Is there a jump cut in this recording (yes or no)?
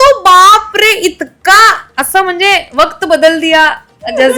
no